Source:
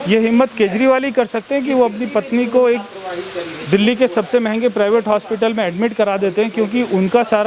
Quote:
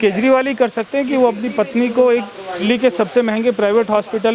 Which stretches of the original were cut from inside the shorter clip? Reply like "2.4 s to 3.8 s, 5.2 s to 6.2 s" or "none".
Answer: 3.2 s to 3.8 s